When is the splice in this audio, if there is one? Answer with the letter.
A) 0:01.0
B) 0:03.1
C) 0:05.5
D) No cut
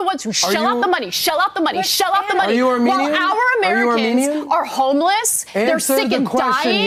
D